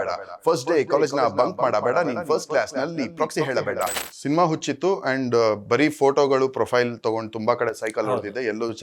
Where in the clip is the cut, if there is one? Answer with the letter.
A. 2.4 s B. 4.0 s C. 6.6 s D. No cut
B